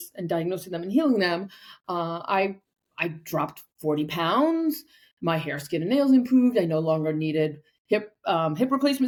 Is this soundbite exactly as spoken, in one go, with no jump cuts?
yes; 0 cuts

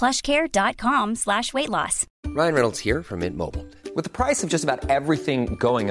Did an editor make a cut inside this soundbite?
yes; 1 cut; at 2.0 s

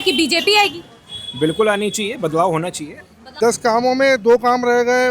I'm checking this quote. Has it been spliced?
yes; 1 cut; at 3.2 s

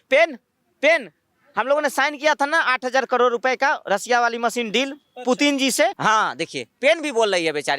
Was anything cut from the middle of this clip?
yes; 1 cut; at 6.0 s

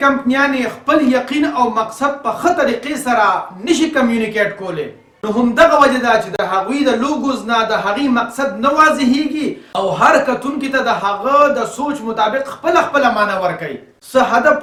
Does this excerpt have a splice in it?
no; 0 cuts

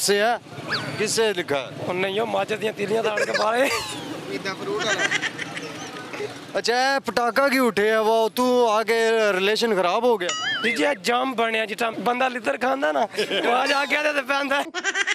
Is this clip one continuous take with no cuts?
yes; 0 cuts

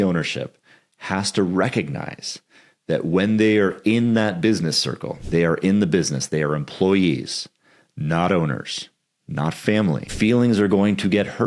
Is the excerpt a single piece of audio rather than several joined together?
no; 2 cuts; at 5.1 s, 10.1 s

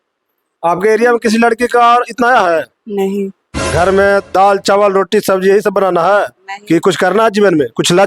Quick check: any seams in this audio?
yes; 1 cut; at 3.6 s

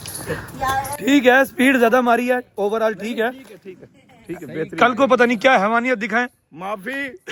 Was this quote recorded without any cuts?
yes; 0 cuts

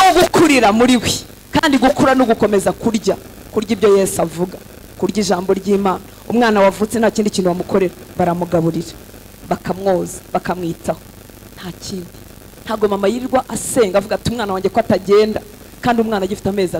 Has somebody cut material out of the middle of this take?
no; 0 cuts

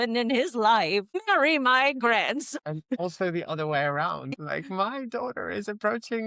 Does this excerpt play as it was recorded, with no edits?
no; 3 cuts; at 1.2 s, 2.6 s, 4.3 s

